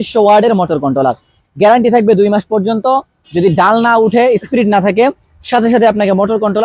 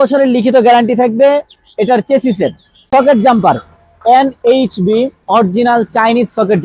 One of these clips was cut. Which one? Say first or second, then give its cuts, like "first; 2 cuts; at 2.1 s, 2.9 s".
second; 1 cut; at 2.9 s